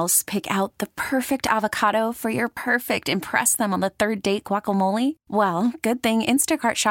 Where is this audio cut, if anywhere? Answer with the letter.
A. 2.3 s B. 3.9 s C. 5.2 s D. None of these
D